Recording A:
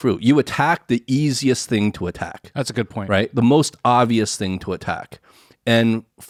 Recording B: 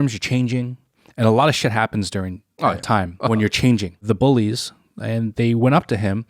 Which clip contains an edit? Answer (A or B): B